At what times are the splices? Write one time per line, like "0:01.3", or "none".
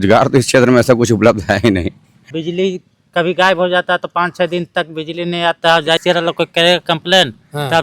0:02.1
0:06.0